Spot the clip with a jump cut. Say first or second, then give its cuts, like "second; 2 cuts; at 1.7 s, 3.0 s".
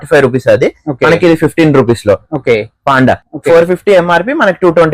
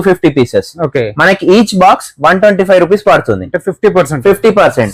first; 1 cut; at 3.3 s